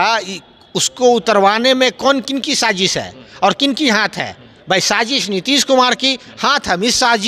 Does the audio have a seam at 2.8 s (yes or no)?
no